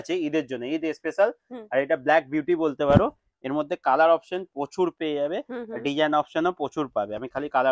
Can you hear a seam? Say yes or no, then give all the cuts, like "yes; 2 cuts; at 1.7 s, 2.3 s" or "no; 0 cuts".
no; 0 cuts